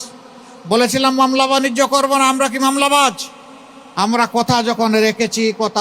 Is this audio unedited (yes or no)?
yes